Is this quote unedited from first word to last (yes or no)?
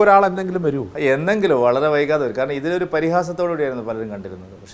yes